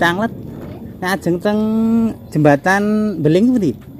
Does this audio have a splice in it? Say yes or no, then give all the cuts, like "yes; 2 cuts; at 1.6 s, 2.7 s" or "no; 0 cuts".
no; 0 cuts